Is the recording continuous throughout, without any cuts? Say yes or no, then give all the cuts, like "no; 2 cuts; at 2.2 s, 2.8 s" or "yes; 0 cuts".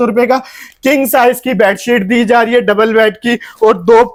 yes; 0 cuts